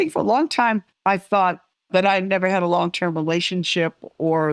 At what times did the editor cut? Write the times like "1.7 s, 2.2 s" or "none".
0.9 s, 1.7 s